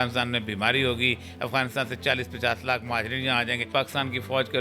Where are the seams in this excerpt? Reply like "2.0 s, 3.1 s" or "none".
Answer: 3.7 s